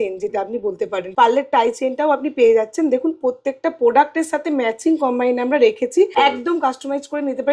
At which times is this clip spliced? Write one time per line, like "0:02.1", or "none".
0:01.0
0:06.1